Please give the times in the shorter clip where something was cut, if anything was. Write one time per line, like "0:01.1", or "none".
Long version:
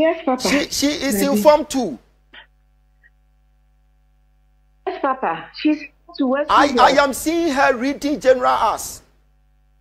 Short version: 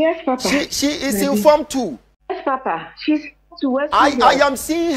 0:02.1